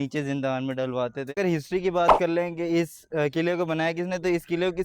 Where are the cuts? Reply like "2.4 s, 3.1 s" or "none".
1.3 s